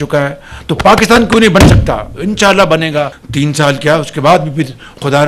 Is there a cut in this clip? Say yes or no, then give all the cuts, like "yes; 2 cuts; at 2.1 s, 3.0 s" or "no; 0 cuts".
yes; 1 cut; at 3.2 s